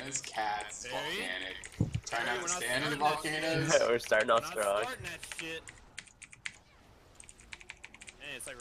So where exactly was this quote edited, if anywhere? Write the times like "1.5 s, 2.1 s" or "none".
6.3 s